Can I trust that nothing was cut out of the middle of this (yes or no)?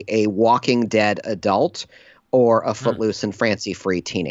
yes